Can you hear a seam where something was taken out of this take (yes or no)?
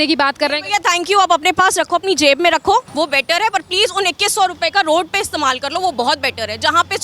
yes